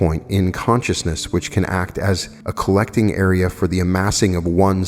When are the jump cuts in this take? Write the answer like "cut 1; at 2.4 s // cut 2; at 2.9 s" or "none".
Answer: cut 1; at 2.4 s